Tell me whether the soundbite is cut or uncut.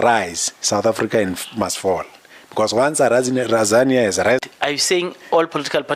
cut